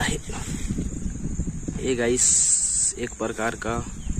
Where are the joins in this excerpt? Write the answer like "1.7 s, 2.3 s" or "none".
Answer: none